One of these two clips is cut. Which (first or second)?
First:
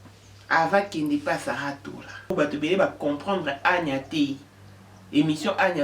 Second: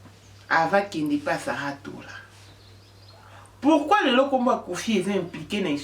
first